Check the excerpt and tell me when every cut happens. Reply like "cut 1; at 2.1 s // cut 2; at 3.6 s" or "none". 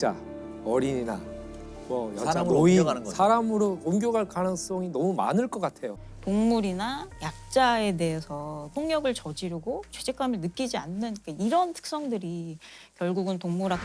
cut 1; at 6.1 s